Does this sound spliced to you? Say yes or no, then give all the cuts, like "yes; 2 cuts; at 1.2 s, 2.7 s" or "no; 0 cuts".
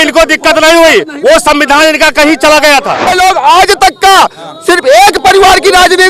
yes; 1 cut; at 3.1 s